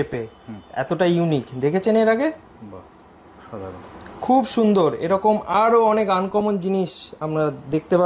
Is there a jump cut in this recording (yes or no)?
no